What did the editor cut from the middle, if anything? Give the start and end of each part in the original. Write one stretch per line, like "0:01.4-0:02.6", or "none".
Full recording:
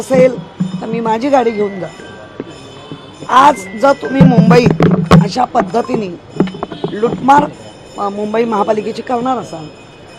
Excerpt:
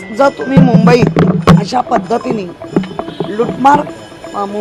none

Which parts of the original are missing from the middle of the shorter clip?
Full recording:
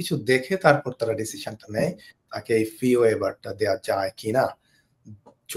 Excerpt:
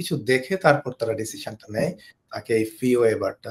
none

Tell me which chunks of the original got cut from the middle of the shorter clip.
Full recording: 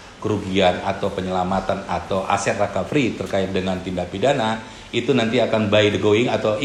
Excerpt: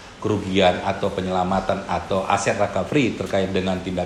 none

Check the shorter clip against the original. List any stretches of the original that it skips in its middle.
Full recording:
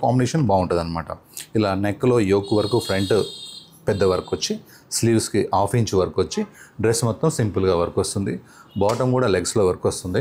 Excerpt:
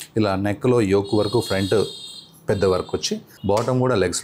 0:04.6-0:08.6

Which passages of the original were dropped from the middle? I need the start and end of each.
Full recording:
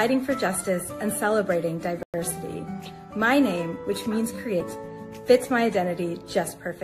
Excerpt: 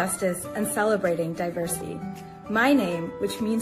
0:02.1-0:02.3

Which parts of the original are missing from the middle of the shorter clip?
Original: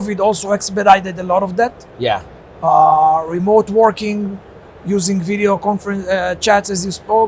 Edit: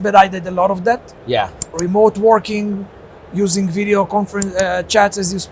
0:02.5-0:03.3

